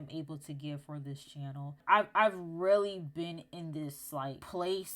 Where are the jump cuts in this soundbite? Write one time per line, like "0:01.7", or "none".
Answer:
0:01.8